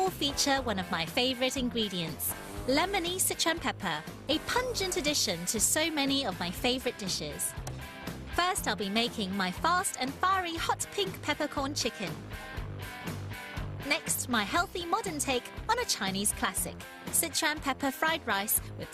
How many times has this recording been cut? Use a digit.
1